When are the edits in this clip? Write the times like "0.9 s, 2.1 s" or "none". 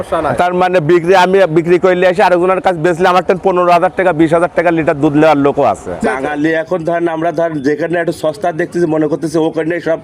6.0 s